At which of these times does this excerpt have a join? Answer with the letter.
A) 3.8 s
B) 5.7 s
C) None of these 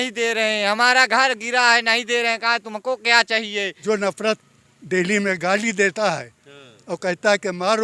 A